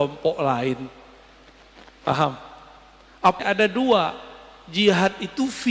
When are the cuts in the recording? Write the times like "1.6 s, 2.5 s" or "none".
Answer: 3.4 s